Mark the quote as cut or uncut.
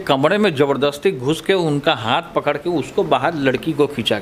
uncut